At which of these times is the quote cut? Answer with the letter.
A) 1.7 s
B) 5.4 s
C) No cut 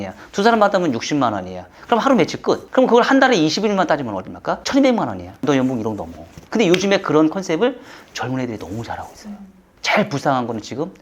B